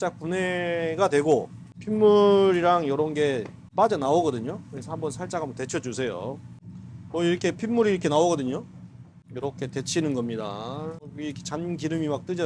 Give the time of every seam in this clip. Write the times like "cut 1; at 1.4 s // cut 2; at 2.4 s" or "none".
none